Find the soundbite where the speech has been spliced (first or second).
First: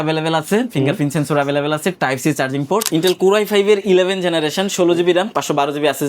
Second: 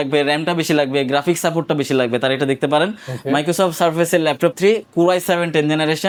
first